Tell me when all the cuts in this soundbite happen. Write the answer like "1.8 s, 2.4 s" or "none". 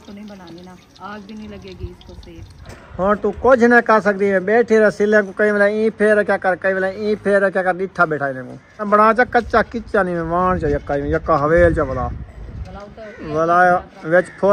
2.6 s, 8.9 s

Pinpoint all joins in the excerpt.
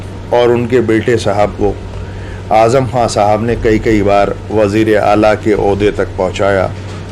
none

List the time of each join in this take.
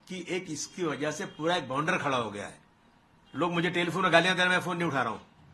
none

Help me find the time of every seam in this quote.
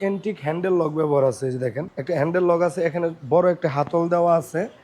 1.9 s

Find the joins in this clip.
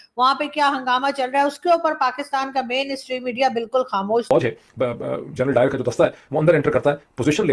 4.2 s

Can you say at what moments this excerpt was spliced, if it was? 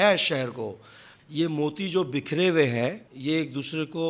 1.1 s, 3.1 s

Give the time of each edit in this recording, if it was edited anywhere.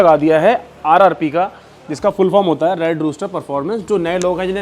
none

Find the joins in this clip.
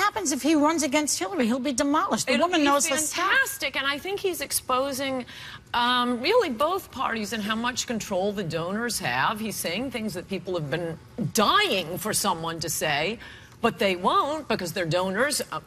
14.3 s

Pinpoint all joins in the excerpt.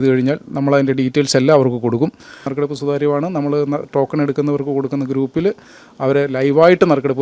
2.5 s

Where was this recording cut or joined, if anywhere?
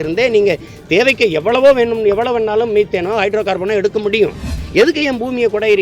4.6 s

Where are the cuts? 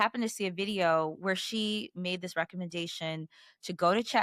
none

